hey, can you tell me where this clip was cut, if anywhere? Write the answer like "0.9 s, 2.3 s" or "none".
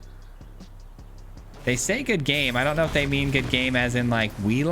1.5 s

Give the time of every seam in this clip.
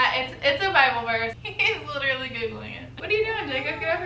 1.4 s, 3.0 s

